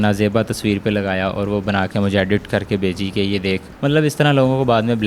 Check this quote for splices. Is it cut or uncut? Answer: uncut